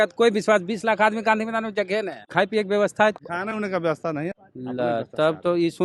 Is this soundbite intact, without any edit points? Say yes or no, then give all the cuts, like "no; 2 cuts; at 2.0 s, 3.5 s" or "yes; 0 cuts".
no; 3 cuts; at 2.2 s, 3.2 s, 4.4 s